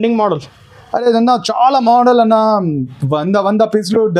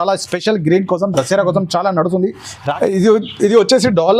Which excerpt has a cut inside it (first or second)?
second